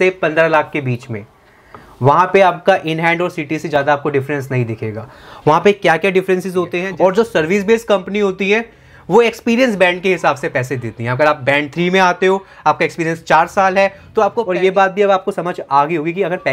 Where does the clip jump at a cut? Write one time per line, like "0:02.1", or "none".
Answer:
0:06.8
0:14.5